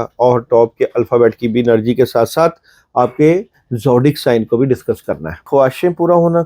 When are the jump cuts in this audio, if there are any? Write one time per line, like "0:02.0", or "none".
0:05.4